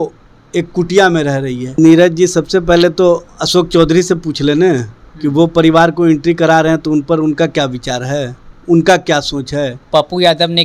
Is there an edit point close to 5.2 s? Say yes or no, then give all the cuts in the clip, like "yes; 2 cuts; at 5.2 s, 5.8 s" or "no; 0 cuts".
no; 2 cuts; at 1.8 s, 9.9 s